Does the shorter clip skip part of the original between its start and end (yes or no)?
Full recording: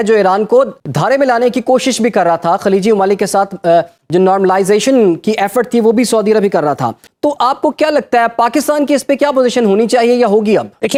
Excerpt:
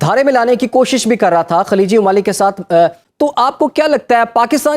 yes